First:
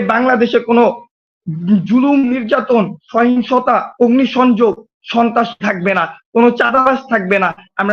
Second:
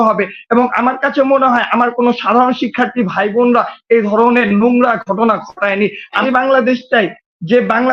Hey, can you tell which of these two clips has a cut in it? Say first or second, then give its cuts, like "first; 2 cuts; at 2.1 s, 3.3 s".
second; 1 cut; at 6.2 s